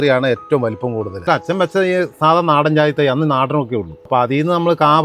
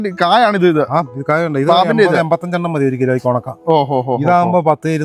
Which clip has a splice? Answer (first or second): first